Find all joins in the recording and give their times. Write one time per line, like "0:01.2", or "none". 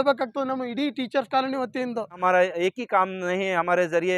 0:02.2